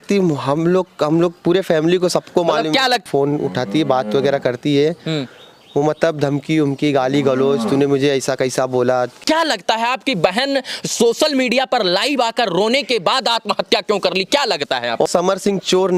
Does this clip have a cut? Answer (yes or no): yes